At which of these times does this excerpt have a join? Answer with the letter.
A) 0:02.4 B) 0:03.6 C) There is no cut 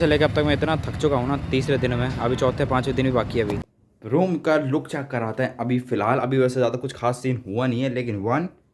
B